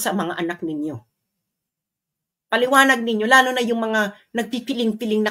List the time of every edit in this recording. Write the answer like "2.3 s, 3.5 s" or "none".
none